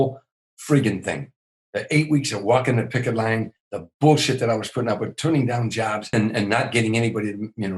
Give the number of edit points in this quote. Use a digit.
1